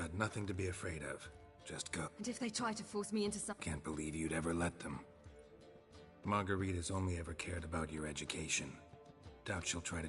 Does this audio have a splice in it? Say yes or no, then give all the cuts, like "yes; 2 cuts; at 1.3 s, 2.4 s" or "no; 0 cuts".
yes; 2 cuts; at 2.1 s, 3.5 s